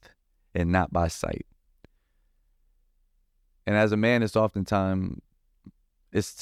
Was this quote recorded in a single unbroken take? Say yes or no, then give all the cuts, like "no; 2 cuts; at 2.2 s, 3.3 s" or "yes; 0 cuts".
yes; 0 cuts